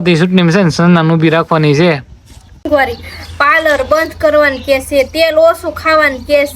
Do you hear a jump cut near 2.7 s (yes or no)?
yes